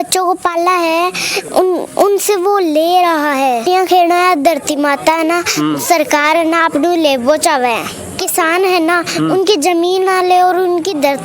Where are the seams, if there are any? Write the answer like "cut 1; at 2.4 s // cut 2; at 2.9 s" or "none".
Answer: cut 1; at 3.6 s // cut 2; at 8.2 s